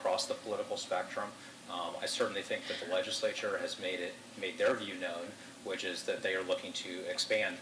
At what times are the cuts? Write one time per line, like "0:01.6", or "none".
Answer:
none